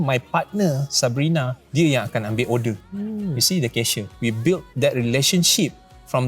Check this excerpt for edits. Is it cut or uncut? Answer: cut